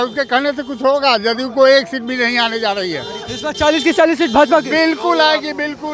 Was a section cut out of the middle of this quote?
no; 0 cuts

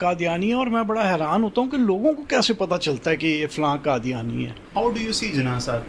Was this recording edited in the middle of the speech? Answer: yes; 1 cut; at 4.6 s

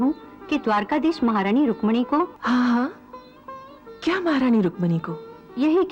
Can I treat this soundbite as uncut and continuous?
no; 1 cut; at 2.4 s

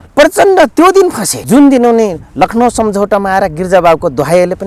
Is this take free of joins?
no; 1 cut; at 1.3 s

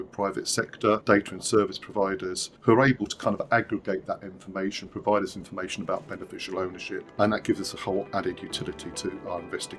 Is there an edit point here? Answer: no; 0 cuts

